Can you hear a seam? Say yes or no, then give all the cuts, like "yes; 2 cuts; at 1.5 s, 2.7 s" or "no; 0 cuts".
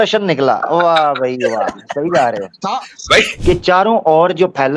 yes; 1 cut; at 3.3 s